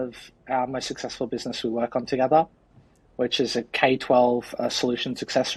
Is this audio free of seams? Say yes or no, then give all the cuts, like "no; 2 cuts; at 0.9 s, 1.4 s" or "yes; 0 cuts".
yes; 0 cuts